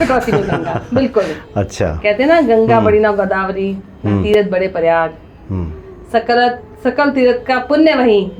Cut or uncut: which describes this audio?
uncut